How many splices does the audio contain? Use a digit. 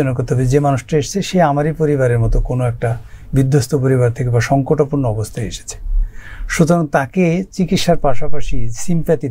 0